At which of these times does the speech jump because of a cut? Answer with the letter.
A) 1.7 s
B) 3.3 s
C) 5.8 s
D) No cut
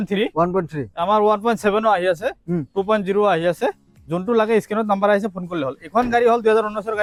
D